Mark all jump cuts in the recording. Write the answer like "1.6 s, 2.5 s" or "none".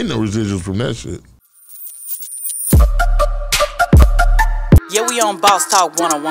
1.4 s